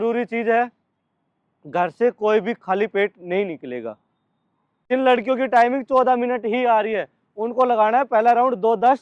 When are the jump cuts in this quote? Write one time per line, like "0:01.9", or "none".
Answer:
0:04.9